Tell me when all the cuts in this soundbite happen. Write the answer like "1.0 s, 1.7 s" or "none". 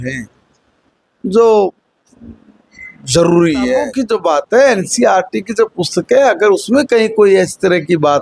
3.9 s